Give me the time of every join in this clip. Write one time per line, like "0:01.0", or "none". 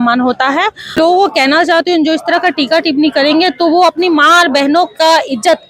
0:01.0